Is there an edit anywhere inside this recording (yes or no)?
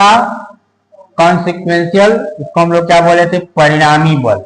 no